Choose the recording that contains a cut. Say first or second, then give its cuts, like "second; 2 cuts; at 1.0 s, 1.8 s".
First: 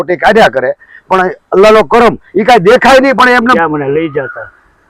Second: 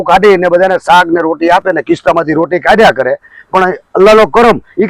first; 1 cut; at 3.5 s